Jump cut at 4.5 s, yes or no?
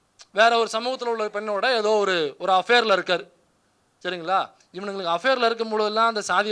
no